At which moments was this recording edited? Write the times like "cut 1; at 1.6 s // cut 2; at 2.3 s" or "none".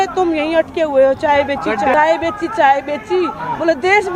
none